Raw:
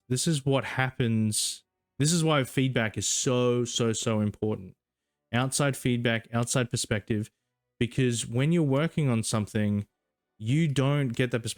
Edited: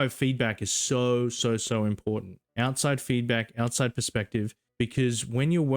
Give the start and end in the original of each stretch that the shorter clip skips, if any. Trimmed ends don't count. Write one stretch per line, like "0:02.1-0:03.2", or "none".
0:04.7-0:05.1
0:07.4-0:07.6